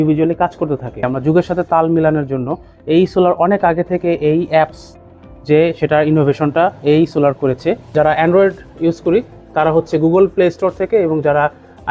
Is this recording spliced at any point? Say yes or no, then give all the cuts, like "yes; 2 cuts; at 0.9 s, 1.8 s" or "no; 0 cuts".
yes; 2 cuts; at 1.1 s, 7.9 s